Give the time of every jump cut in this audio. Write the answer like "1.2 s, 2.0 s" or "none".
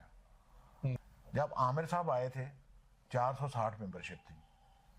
1.0 s